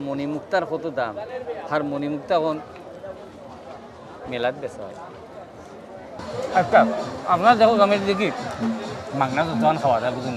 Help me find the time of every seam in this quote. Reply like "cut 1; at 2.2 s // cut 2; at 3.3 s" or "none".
cut 1; at 6.2 s